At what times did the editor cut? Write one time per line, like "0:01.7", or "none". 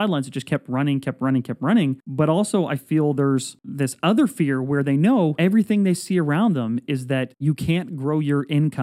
0:02.0
0:03.6
0:05.3
0:07.3